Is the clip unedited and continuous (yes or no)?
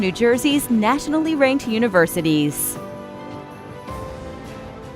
no